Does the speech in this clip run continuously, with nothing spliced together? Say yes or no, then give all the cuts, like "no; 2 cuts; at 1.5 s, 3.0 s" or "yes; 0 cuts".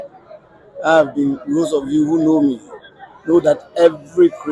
yes; 0 cuts